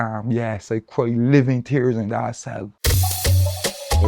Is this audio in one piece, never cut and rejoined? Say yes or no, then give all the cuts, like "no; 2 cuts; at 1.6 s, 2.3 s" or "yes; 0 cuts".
no; 1 cut; at 2.8 s